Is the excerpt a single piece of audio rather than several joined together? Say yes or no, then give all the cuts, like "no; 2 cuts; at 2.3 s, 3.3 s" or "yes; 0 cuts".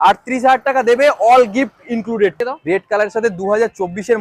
no; 1 cut; at 2.4 s